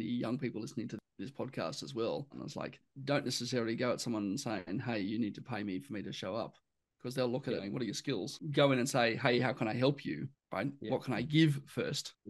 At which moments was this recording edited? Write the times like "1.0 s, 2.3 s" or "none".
1.1 s, 2.5 s, 8.4 s